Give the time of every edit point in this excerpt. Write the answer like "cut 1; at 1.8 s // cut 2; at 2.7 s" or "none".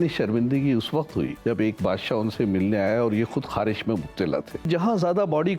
cut 1; at 1.4 s // cut 2; at 4.7 s